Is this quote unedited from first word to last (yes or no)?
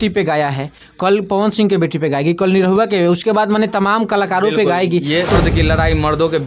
no